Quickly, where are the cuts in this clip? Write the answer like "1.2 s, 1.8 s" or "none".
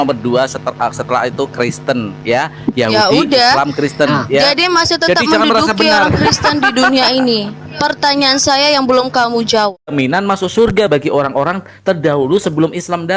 9.9 s